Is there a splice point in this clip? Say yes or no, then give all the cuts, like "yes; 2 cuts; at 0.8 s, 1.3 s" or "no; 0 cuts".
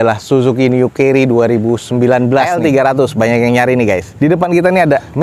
yes; 2 cuts; at 2.5 s, 4.1 s